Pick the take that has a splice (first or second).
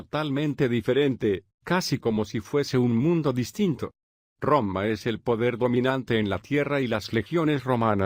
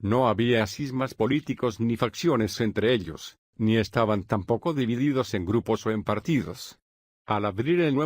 second